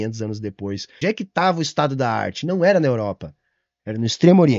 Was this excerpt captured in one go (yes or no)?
no